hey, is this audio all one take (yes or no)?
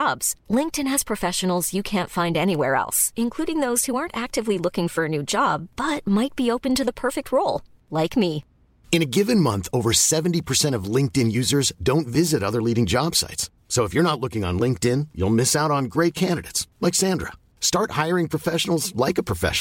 yes